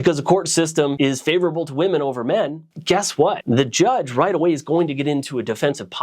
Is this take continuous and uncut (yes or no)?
no